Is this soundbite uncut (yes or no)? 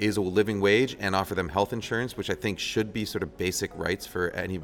yes